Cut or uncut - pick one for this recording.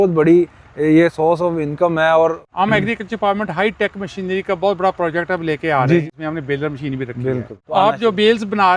cut